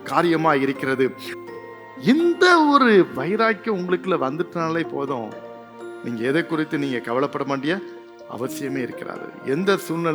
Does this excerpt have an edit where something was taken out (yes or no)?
yes